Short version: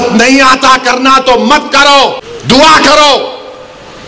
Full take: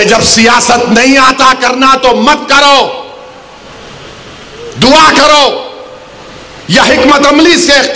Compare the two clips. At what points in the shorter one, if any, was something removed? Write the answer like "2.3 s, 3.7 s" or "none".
2.3 s